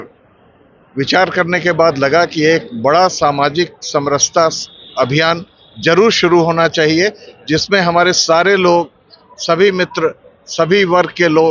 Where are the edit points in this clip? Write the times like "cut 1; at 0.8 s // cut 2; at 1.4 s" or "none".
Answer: none